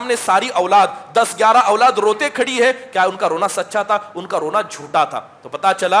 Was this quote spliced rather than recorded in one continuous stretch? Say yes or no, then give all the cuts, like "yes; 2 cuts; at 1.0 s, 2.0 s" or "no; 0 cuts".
no; 0 cuts